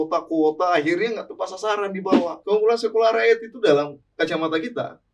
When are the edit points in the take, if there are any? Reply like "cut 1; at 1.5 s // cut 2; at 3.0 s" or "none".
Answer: cut 1; at 2.4 s